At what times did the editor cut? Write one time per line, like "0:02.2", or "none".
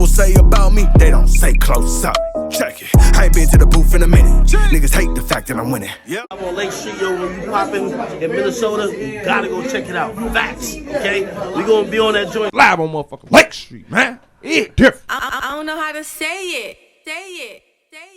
none